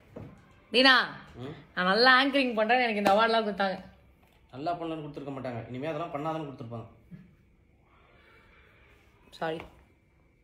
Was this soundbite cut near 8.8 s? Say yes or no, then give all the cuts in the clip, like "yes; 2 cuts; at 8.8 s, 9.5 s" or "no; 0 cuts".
yes; 2 cuts; at 6.9 s, 8.8 s